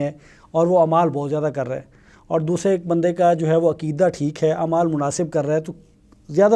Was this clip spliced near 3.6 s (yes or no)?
no